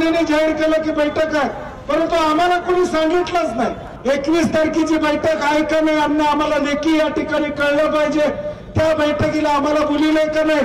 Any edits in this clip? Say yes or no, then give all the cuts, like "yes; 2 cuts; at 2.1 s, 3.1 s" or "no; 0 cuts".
yes; 1 cut; at 3.9 s